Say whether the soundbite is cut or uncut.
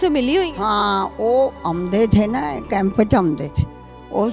uncut